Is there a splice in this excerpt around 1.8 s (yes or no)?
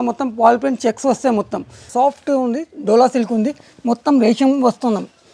yes